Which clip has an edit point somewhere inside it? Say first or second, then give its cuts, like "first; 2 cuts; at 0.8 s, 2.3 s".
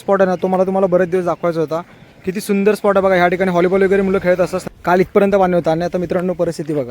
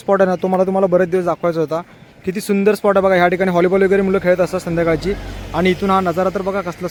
first; 1 cut; at 4.6 s